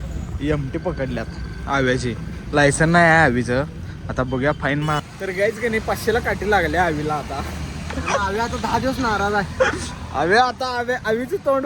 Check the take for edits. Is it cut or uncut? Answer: cut